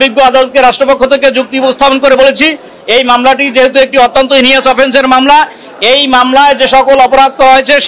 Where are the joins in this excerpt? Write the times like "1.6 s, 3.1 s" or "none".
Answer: none